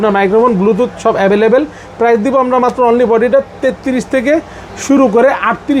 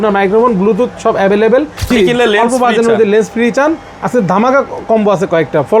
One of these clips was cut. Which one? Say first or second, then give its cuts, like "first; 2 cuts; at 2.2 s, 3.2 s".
second; 1 cut; at 1.9 s